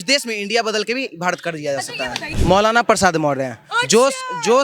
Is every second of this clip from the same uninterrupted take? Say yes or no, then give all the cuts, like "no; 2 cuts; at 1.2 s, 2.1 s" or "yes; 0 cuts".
no; 1 cut; at 2.3 s